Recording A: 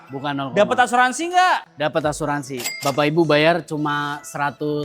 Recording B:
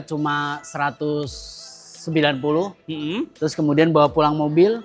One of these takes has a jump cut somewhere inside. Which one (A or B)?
A